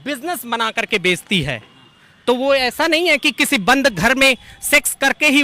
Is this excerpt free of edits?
yes; 0 cuts

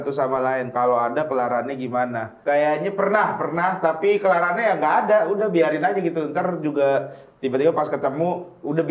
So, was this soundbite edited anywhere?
no; 0 cuts

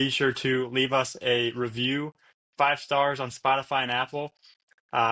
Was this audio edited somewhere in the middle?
no; 0 cuts

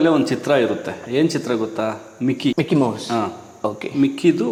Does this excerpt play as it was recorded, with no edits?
yes; 0 cuts

